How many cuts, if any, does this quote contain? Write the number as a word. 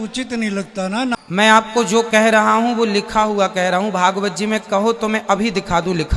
one